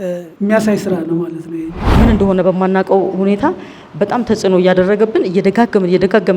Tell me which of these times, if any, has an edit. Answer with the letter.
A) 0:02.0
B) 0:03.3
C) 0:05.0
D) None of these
A